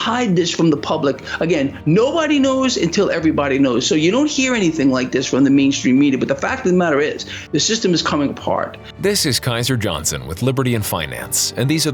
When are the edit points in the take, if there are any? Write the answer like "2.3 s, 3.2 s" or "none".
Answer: 8.8 s